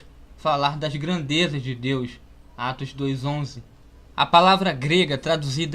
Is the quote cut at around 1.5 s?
yes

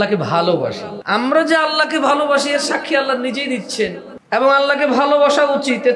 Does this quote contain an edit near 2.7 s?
no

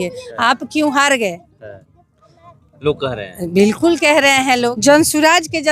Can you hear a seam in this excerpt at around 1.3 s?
no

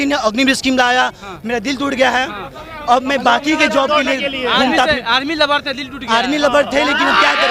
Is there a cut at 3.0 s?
no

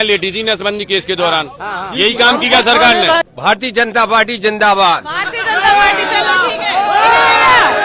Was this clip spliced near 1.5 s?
no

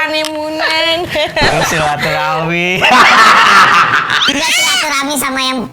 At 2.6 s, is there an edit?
no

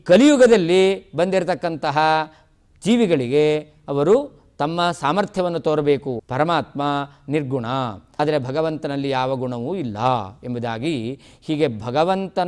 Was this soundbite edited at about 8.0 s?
yes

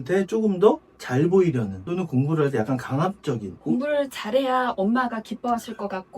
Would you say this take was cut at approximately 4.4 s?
no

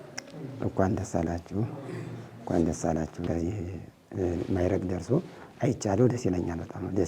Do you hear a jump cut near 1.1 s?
no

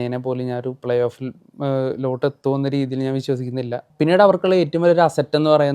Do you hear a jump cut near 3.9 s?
yes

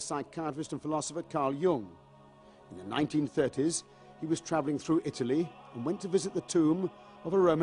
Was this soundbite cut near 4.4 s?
yes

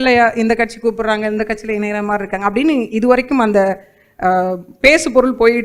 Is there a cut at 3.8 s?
no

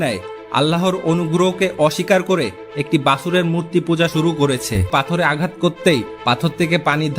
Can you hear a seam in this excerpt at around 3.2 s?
no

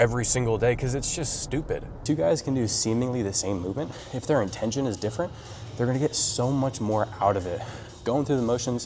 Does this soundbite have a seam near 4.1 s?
yes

